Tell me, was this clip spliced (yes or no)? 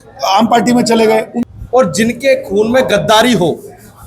yes